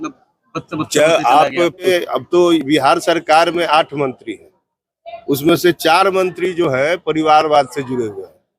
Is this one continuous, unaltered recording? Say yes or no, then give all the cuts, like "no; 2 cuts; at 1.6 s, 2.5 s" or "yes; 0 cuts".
no; 1 cut; at 1.9 s